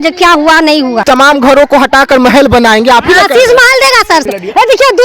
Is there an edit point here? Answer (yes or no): yes